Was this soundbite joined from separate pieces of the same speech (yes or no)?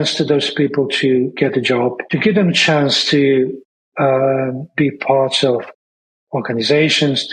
no